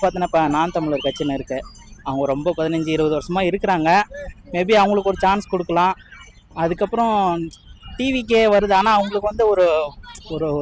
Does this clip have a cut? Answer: no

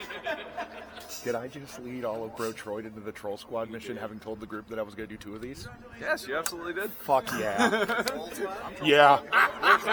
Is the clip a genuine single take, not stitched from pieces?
yes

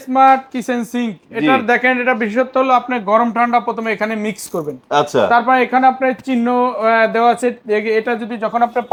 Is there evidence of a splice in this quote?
no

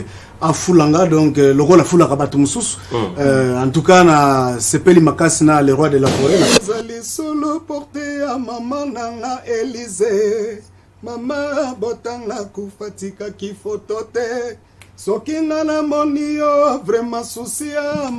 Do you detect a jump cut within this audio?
yes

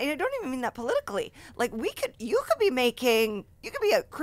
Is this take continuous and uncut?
yes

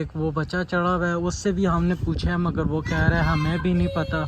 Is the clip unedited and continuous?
yes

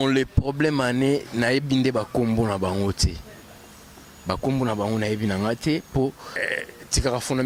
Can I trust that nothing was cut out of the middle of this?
no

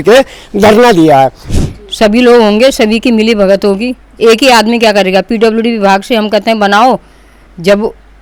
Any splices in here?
yes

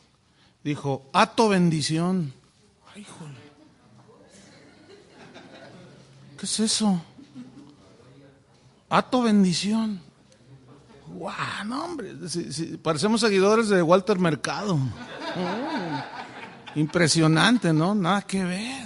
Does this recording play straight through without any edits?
no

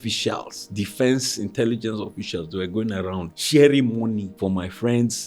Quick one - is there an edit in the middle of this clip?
yes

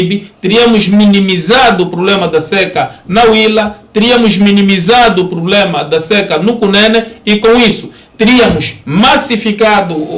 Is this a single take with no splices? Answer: yes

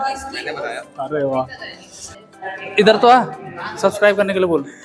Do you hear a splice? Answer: yes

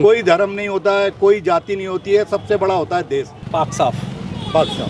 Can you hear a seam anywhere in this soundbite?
yes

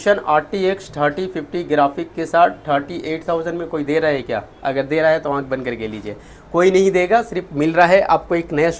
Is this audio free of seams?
yes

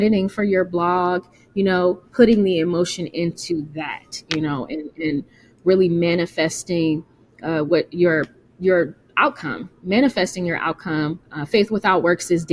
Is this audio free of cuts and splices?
yes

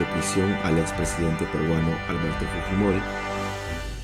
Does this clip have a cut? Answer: no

